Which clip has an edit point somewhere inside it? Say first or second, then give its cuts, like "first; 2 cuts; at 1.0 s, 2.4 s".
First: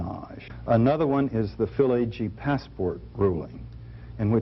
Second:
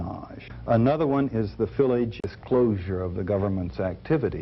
first; 1 cut; at 2.2 s